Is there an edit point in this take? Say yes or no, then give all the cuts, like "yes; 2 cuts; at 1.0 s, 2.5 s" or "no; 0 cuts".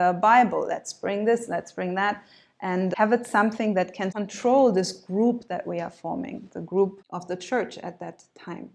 yes; 3 cuts; at 2.9 s, 4.1 s, 7.0 s